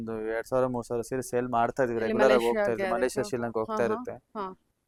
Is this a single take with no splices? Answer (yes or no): yes